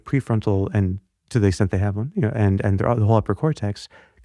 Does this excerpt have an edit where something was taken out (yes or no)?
no